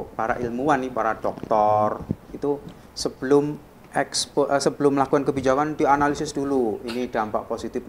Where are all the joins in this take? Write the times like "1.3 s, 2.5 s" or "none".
none